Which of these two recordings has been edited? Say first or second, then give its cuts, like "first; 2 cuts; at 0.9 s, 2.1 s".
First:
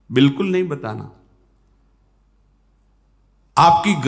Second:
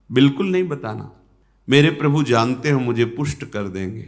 second; 1 cut; at 1.7 s